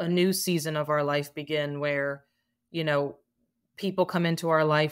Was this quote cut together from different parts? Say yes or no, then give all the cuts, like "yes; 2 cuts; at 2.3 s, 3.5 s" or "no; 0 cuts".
no; 0 cuts